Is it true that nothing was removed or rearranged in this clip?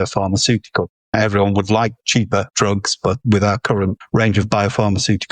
no; 3 cuts; at 1.1 s, 2.5 s, 4.0 s

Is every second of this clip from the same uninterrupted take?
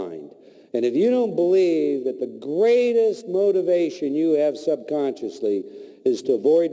yes; 0 cuts

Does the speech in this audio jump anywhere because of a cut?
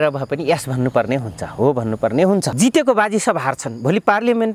yes; 1 cut; at 2.5 s

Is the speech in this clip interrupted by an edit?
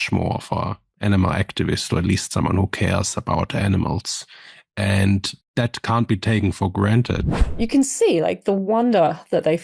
yes; 2 cuts; at 5.4 s, 7.3 s

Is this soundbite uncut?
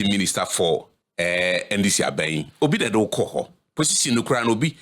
no; 1 cut; at 1.0 s

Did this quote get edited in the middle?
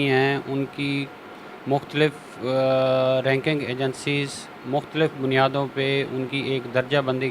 no; 0 cuts

